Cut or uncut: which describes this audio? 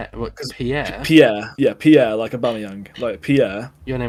uncut